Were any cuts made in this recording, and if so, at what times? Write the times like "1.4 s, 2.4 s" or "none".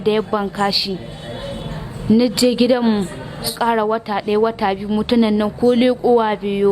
3.5 s